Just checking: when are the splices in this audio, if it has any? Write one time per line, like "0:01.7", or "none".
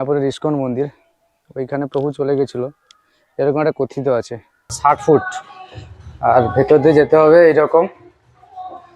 0:04.8